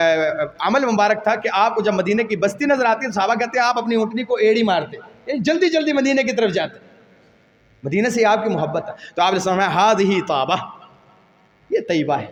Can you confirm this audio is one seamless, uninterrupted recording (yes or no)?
yes